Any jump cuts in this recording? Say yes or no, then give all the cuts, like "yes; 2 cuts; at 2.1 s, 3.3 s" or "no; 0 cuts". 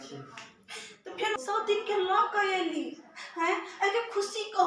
yes; 1 cut; at 1.3 s